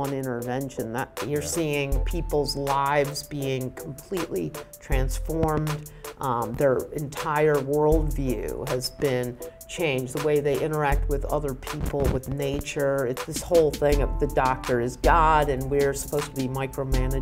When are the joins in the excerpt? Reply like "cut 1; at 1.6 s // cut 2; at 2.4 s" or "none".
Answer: cut 1; at 1.2 s // cut 2; at 13.3 s